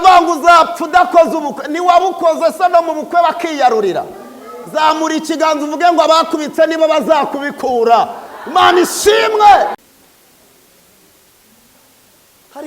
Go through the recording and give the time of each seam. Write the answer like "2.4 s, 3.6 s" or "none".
9.8 s